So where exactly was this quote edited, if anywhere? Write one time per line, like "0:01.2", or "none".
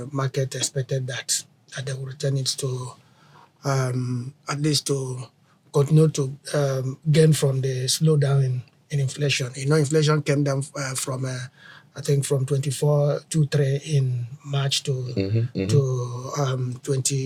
none